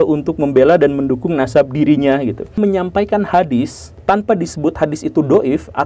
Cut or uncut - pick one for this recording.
cut